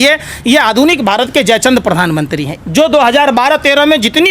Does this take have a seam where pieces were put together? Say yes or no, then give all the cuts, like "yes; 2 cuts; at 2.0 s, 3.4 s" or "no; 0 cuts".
yes; 1 cut; at 2.5 s